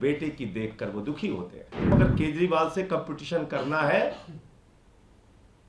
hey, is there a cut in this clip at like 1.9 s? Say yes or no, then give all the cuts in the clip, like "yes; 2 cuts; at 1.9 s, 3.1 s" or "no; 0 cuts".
yes; 1 cut; at 1.9 s